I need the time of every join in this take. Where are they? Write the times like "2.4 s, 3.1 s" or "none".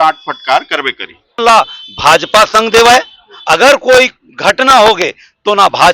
1.4 s